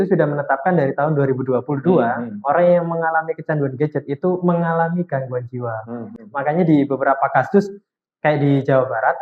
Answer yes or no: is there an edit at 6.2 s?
no